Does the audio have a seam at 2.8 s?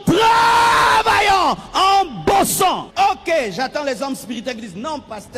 yes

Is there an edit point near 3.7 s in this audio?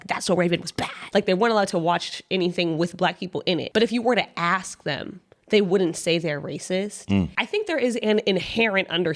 yes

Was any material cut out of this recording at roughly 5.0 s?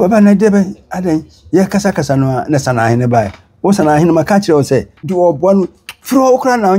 yes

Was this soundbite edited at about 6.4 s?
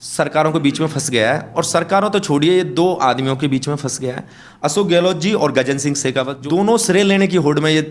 yes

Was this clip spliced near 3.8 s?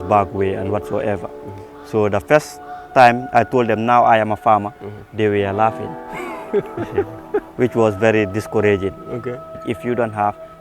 no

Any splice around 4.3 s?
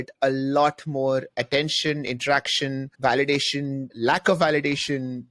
no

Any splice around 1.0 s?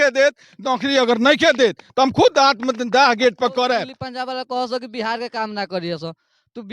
no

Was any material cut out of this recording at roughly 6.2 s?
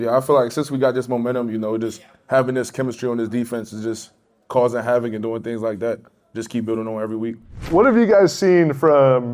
no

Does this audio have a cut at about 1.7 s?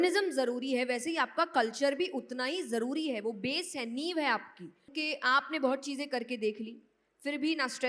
no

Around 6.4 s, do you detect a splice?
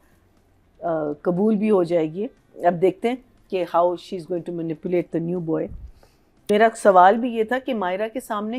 yes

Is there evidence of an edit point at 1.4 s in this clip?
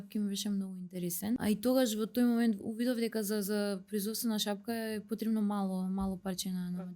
yes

